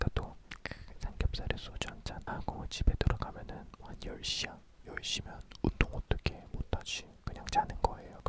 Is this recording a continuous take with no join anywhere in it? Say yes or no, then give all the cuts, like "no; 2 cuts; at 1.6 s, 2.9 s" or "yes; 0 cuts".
no; 1 cut; at 2.3 s